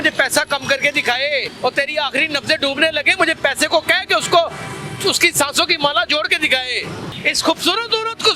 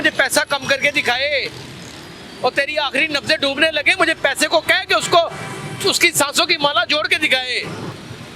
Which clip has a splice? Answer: first; 2 cuts; at 1.5 s, 7.1 s

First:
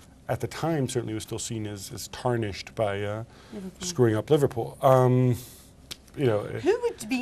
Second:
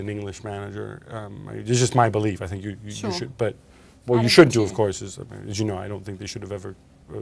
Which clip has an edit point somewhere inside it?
first; 1 cut; at 5.7 s

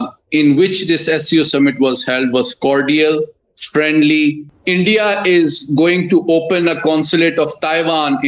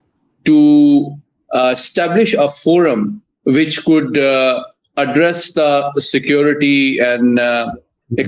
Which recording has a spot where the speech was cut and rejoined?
first; 1 cut; at 4.5 s

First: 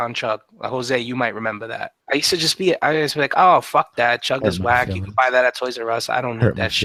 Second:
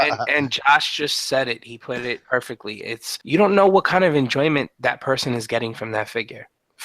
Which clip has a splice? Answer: second; 1 cut; at 2.2 s

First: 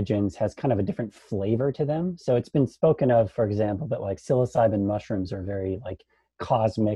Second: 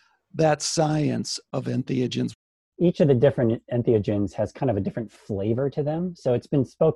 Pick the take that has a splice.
second; 2 cuts; at 1.4 s, 2.4 s

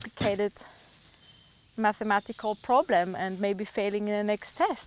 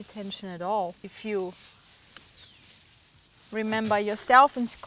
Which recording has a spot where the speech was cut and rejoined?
second; 1 cut; at 1.1 s

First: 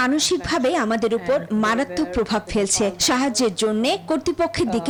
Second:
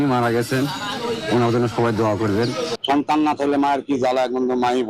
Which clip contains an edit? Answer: second; 1 cut; at 2.7 s

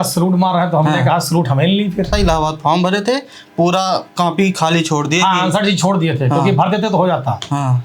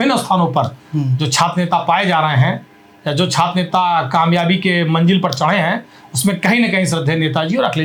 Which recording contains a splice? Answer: first; 1 cut; at 2.1 s

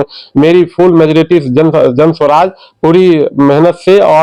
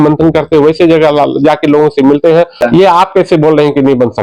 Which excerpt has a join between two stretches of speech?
second; 1 cut; at 2.6 s

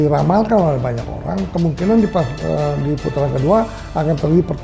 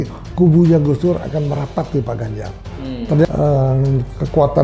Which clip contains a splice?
second; 1 cut; at 3.3 s

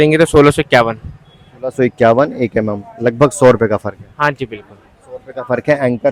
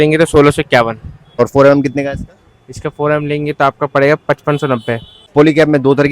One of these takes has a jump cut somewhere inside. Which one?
second; 2 cuts; at 1.4 s, 5.1 s

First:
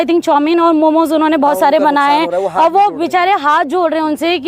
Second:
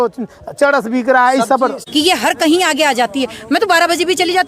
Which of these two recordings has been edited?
second; 1 cut; at 1.8 s

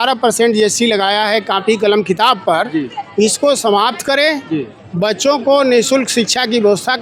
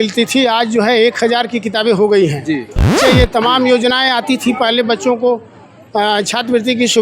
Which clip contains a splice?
second; 1 cut; at 2.9 s

